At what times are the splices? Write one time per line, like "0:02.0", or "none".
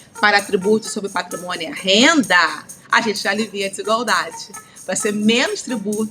none